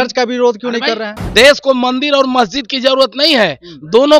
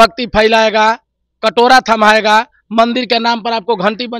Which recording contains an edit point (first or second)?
first